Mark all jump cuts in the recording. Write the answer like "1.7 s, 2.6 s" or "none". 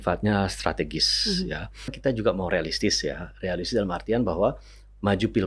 2.0 s